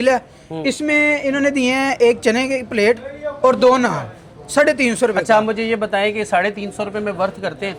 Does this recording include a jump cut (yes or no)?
no